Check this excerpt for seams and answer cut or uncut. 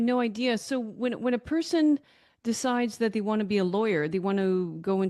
uncut